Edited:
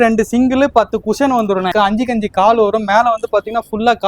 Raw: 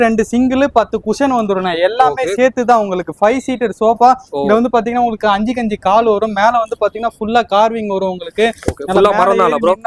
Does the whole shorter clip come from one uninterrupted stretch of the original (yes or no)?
no